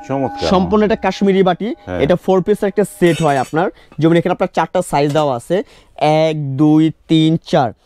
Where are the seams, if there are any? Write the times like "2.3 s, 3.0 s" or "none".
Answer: none